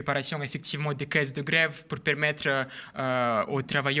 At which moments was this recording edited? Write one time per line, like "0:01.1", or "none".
none